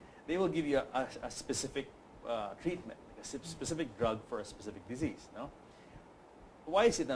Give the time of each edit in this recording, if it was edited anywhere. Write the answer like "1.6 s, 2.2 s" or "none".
none